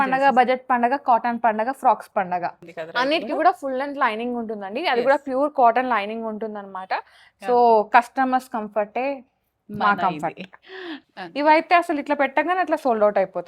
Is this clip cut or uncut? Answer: cut